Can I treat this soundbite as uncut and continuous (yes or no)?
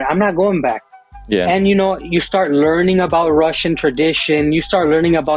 yes